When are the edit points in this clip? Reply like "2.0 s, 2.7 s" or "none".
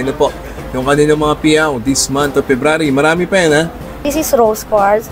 3.9 s

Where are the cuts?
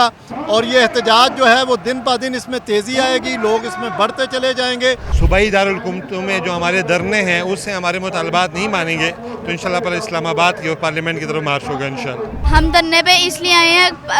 5.1 s, 12.4 s

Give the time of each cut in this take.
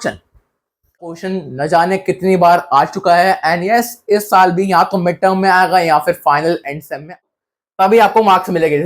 1.2 s, 7.2 s

